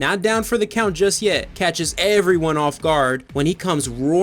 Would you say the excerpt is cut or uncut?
cut